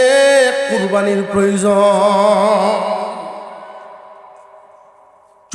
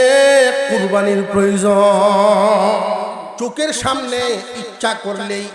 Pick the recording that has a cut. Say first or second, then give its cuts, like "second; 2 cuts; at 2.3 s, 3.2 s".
second; 1 cut; at 3.3 s